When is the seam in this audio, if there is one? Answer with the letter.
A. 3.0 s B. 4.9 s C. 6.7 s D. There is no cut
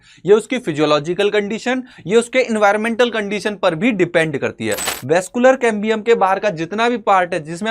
B